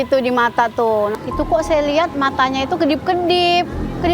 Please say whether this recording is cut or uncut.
cut